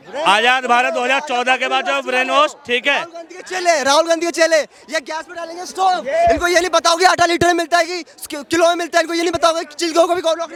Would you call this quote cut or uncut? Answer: uncut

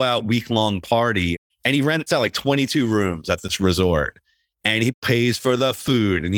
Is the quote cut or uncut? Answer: cut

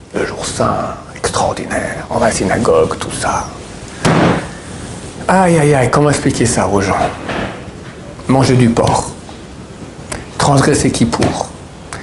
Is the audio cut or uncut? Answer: uncut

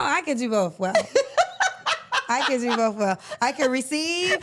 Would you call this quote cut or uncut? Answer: uncut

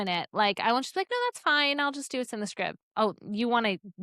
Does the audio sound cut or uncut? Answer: uncut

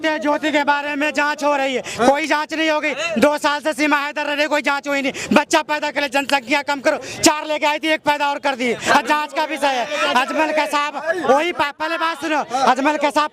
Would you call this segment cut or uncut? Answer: uncut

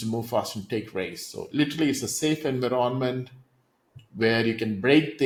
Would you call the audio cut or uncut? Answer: uncut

